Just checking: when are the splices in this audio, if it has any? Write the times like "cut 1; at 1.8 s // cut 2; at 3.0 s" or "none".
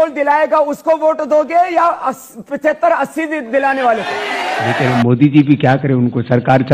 cut 1; at 4.7 s